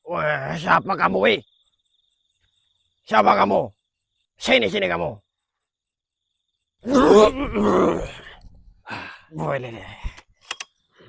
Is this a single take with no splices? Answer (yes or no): yes